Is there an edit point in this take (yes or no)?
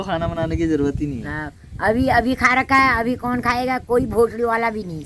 no